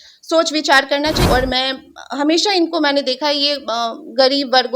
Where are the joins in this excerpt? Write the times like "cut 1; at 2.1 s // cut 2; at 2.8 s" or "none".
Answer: cut 1; at 1.2 s